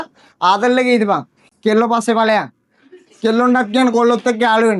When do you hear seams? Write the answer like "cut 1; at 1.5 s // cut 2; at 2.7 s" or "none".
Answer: none